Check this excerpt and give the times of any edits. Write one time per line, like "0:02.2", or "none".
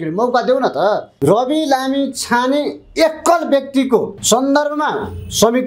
0:01.1
0:04.2